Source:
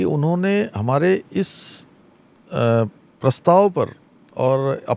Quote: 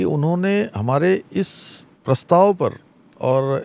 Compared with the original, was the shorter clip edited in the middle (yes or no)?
yes